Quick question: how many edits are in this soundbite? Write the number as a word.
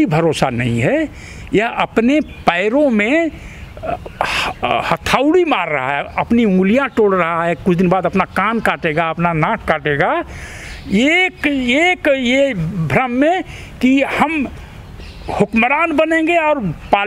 zero